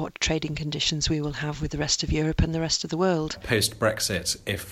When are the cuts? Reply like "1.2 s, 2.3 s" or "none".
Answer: 3.4 s